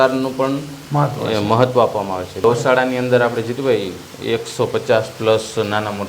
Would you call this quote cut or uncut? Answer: cut